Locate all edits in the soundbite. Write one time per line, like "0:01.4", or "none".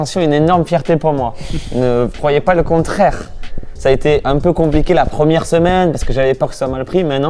none